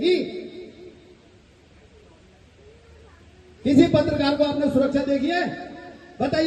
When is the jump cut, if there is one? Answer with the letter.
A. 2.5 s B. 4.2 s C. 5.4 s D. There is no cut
D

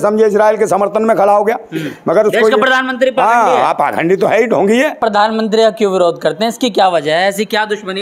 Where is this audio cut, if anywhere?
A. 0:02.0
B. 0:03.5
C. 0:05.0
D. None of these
C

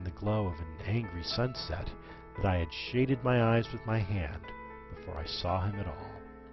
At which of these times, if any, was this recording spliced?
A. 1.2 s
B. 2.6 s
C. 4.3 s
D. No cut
B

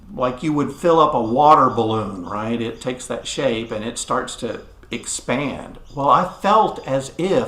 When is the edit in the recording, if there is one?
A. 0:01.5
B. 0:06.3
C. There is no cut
B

